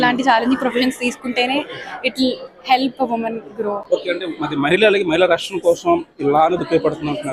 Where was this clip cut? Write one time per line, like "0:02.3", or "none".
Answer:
none

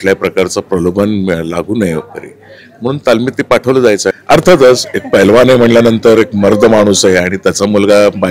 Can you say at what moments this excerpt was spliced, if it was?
0:04.2

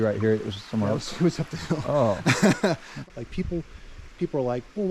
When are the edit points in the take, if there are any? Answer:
0:02.9

